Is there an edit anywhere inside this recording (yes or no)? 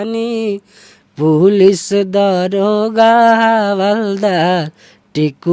no